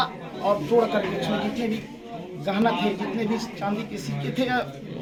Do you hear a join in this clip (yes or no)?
no